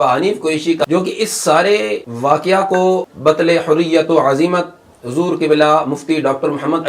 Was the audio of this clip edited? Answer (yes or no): yes